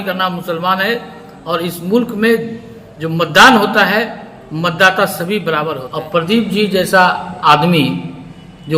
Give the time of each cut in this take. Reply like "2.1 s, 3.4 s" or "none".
5.9 s